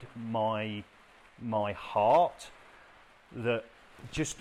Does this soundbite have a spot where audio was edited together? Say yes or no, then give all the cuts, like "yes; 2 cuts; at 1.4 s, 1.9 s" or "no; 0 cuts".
no; 0 cuts